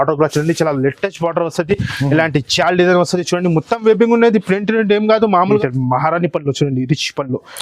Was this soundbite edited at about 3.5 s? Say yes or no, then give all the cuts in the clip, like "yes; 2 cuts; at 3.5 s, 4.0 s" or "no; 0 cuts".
no; 1 cut; at 5.6 s